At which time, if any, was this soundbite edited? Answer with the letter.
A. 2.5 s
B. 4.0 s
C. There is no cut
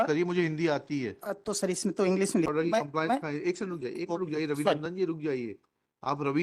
A